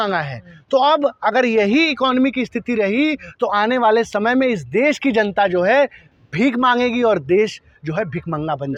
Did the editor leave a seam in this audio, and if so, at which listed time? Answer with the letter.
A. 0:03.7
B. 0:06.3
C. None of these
C